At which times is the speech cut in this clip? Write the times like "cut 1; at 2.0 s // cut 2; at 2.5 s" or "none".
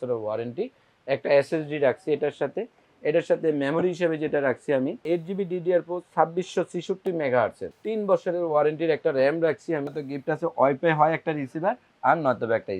cut 1; at 5.0 s // cut 2; at 7.7 s // cut 3; at 9.9 s